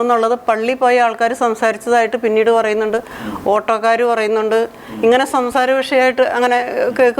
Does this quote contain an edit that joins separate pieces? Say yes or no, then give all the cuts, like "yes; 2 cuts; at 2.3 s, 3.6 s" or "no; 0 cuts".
no; 0 cuts